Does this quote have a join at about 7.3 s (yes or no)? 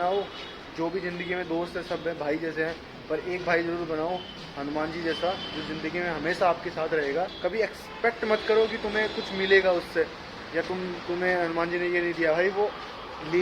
yes